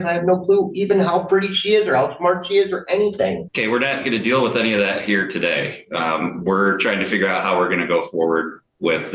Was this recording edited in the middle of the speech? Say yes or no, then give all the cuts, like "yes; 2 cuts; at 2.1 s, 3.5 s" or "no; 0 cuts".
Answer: no; 0 cuts